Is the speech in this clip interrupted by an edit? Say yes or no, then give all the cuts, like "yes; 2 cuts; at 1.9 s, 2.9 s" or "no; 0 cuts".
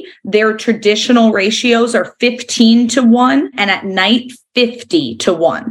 yes; 1 cut; at 3.7 s